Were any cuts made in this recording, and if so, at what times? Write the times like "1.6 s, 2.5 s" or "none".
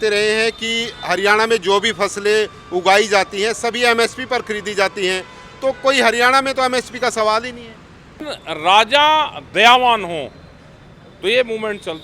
8.2 s